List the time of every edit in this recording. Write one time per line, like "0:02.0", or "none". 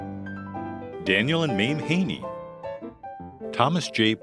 0:01.0